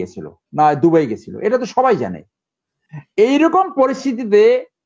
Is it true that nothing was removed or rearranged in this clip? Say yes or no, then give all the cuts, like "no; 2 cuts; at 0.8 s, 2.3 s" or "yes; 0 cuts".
yes; 0 cuts